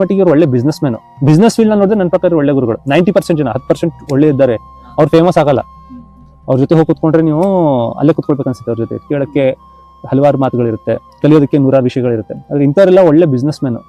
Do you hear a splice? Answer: no; 0 cuts

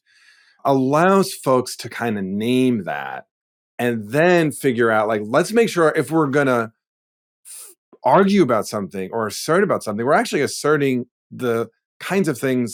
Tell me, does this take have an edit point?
no; 0 cuts

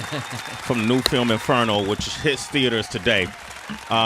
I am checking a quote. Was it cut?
yes; 1 cut; at 2.4 s

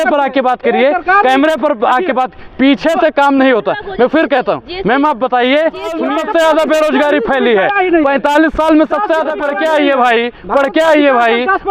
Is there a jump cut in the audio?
yes; 2 cuts; at 6.0 s, 9.4 s

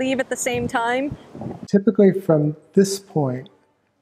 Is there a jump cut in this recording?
yes; 1 cut; at 1.7 s

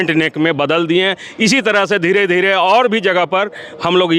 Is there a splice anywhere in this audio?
no; 0 cuts

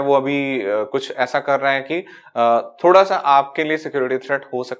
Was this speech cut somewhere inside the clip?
no; 0 cuts

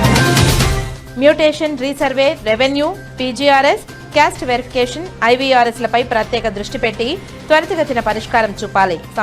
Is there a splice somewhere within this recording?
yes; 1 cut; at 0.9 s

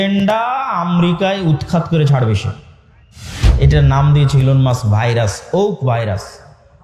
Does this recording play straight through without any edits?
no; 1 cut; at 3.4 s

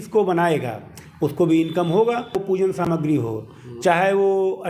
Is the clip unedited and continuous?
no; 1 cut; at 2.4 s

